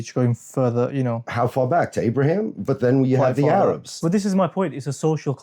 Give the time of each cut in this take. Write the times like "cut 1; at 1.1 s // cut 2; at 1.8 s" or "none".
cut 1; at 4.0 s